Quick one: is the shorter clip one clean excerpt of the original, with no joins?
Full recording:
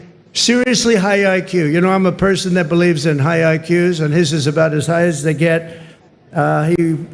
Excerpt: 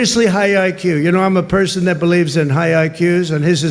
yes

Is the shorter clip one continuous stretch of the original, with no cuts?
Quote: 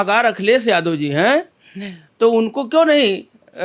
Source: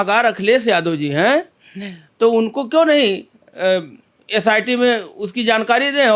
yes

